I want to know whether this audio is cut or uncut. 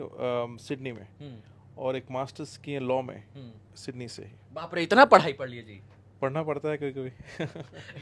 uncut